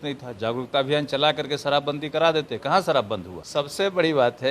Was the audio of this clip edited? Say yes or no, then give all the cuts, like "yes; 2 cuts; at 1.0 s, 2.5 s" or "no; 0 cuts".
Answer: yes; 1 cut; at 3.4 s